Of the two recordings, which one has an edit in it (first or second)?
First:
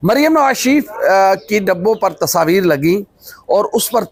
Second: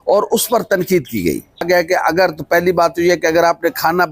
second